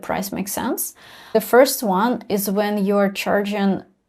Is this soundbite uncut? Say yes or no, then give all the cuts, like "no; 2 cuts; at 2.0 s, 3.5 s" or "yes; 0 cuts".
no; 1 cut; at 1.4 s